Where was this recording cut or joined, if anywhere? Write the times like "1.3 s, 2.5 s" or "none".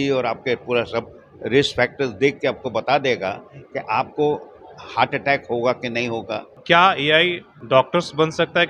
6.5 s, 7.5 s